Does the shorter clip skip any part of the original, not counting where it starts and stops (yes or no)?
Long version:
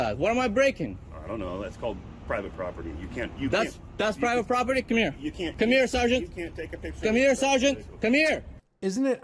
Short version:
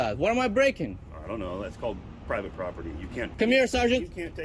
yes